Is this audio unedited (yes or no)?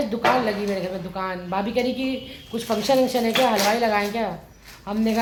yes